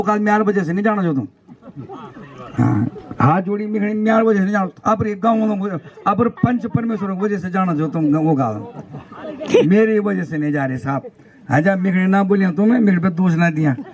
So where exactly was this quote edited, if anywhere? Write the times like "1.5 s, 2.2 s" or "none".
none